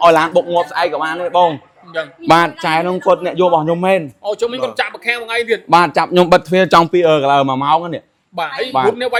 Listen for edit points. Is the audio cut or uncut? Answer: uncut